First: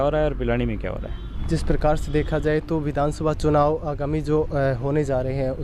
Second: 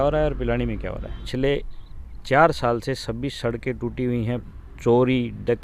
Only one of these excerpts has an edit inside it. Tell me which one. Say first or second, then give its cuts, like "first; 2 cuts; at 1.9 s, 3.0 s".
second; 2 cuts; at 1.1 s, 4.5 s